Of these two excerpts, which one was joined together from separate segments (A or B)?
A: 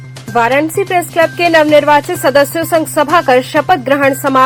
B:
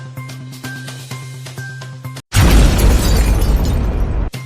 B